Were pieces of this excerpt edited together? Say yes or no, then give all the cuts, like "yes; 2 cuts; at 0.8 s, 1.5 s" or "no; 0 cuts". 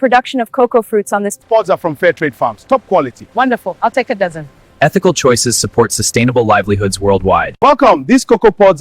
yes; 2 cuts; at 1.4 s, 7.5 s